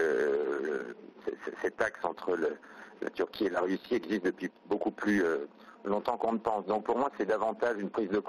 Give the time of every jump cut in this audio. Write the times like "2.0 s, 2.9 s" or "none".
none